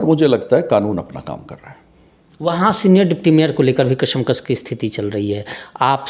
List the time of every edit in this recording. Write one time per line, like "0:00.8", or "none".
none